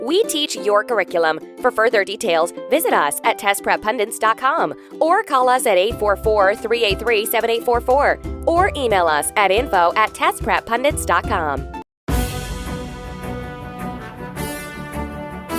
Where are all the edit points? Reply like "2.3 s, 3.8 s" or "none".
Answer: 11.9 s